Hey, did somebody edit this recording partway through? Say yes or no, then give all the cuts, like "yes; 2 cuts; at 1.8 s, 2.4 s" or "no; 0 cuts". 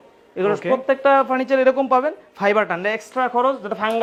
no; 0 cuts